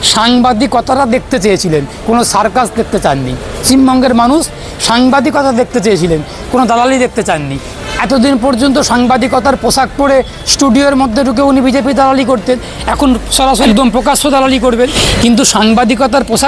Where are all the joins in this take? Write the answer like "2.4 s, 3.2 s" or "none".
3.6 s, 13.6 s, 15.0 s